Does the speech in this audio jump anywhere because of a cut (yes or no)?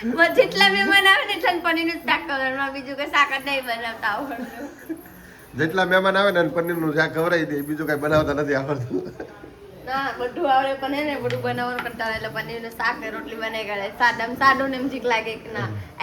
no